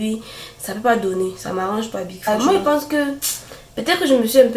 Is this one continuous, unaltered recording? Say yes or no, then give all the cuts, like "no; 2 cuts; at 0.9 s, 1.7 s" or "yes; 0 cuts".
no; 1 cut; at 2.3 s